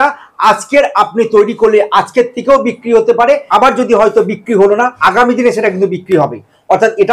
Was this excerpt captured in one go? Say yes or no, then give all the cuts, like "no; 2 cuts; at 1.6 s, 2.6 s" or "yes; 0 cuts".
no; 2 cuts; at 3.5 s, 4.9 s